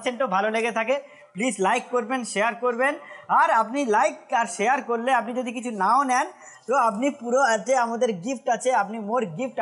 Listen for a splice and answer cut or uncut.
uncut